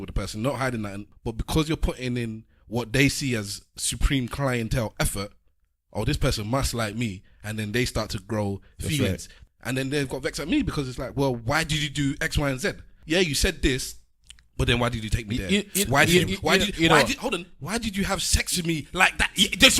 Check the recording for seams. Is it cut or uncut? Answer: cut